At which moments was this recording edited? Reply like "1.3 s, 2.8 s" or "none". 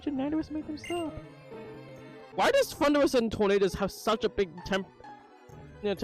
2.2 s

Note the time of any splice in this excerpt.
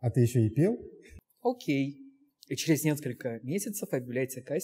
1.3 s

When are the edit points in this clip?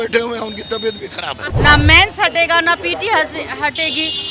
1.5 s

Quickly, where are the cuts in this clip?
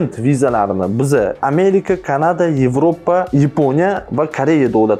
none

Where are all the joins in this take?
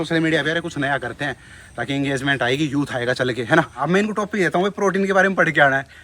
3.8 s

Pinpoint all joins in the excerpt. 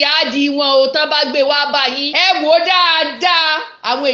2.1 s

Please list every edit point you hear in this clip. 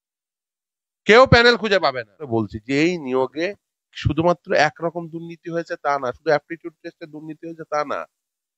2.3 s

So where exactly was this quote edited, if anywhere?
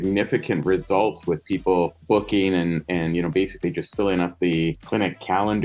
2.0 s, 4.8 s

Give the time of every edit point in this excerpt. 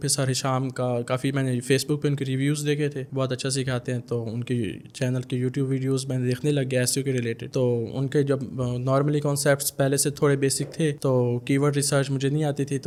none

